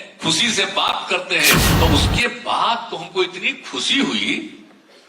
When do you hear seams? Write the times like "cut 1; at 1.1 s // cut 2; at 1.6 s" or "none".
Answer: cut 1; at 1.7 s